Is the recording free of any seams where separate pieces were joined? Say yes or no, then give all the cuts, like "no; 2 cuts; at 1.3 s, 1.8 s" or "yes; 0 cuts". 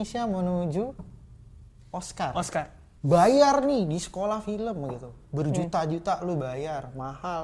no; 1 cut; at 2.9 s